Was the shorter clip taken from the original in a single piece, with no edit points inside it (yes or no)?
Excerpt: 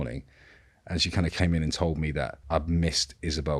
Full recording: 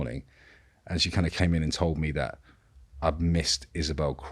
no